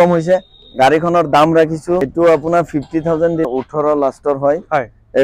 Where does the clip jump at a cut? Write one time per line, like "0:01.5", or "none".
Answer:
0:02.1
0:03.5